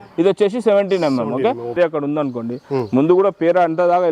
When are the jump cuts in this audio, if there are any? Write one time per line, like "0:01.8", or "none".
0:01.8